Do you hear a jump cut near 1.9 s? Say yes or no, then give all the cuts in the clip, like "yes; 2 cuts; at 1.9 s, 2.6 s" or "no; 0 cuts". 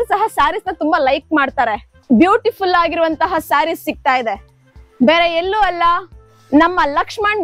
yes; 1 cut; at 1.9 s